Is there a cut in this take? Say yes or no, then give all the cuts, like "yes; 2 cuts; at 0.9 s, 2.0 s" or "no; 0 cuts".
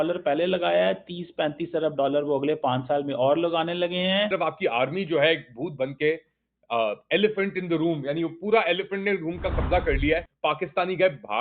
yes; 1 cut; at 4.3 s